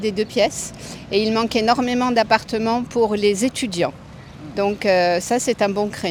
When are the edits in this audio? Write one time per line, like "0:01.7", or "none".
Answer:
none